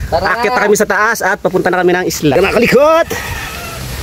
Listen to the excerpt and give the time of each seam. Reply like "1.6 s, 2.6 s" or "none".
2.4 s